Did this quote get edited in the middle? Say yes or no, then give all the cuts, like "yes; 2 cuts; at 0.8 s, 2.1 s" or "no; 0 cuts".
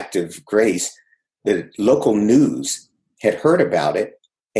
no; 0 cuts